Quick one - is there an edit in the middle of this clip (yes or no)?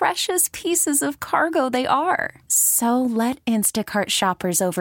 no